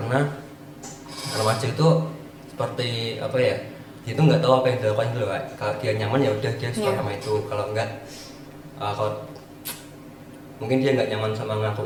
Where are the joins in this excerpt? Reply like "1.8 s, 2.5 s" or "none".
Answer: none